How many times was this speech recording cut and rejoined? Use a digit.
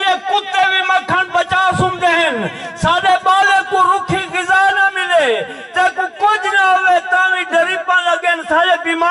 0